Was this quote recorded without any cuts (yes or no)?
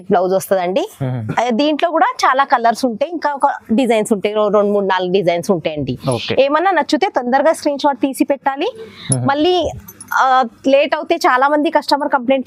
yes